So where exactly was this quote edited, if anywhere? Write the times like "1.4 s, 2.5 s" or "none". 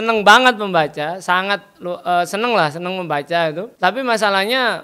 3.7 s